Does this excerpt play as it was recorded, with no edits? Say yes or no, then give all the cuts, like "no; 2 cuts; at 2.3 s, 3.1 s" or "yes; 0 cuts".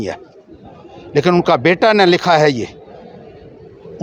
yes; 0 cuts